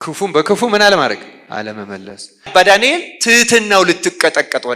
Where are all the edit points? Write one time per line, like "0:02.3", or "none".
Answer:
0:02.5